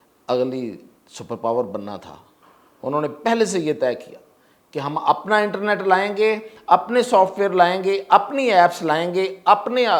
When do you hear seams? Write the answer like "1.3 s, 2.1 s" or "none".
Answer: none